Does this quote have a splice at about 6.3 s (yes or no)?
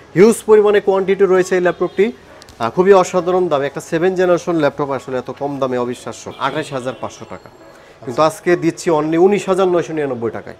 yes